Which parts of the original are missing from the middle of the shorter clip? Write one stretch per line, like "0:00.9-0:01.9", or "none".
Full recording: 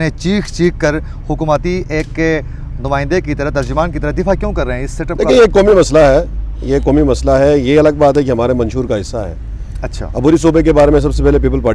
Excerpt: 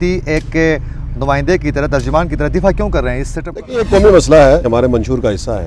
0:06.3-0:08.3